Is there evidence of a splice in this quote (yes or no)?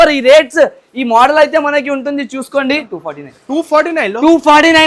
yes